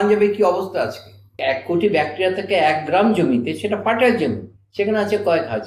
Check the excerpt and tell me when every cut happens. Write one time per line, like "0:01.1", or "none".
0:01.4